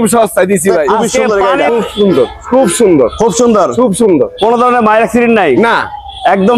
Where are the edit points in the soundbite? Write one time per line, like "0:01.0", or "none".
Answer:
0:01.1